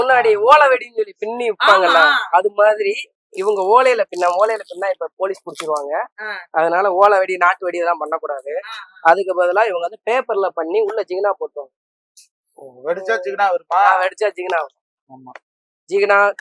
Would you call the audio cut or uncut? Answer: uncut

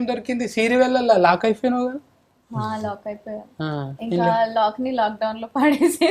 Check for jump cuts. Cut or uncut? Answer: uncut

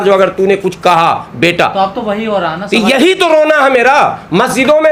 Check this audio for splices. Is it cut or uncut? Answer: uncut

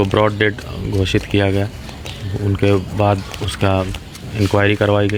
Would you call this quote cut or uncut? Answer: uncut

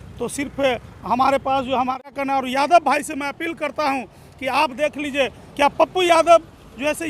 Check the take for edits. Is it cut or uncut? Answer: cut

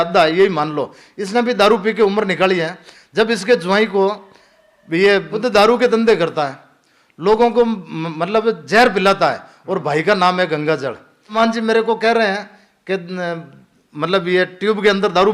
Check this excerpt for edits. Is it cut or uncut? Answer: cut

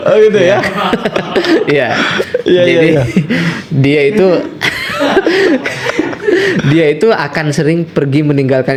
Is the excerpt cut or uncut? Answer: uncut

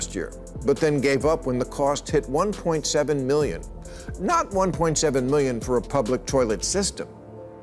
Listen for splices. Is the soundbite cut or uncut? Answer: uncut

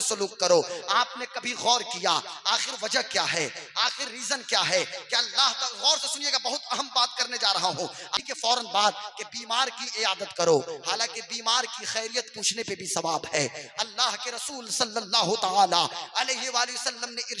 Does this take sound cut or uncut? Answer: cut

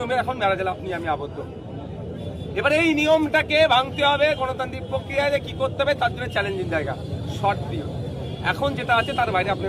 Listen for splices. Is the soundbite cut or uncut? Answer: uncut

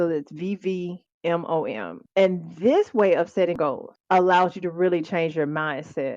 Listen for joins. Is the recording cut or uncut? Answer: cut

